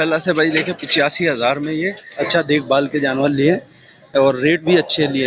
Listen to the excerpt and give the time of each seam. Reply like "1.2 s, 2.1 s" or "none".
2.0 s